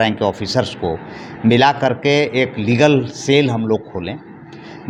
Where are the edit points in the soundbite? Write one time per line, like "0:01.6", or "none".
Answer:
none